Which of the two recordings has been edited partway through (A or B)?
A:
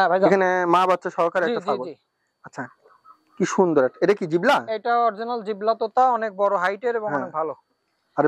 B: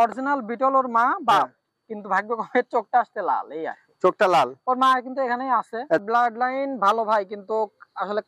B